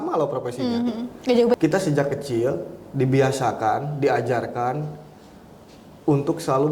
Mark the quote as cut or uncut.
cut